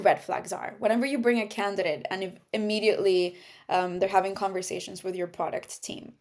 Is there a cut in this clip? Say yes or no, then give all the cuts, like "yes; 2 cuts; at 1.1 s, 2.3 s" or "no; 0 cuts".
no; 0 cuts